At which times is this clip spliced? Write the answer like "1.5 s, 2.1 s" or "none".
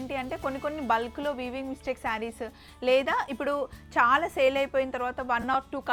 none